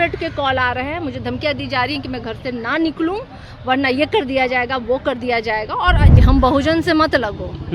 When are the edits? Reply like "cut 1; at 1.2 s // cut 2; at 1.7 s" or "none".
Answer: cut 1; at 6.1 s